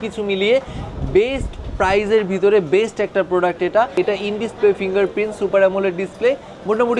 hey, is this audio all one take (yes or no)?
no